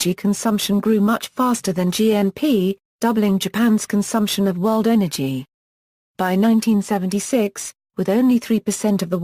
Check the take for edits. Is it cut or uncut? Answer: cut